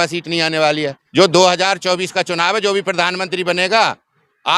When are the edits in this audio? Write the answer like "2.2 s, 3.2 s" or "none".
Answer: 1.0 s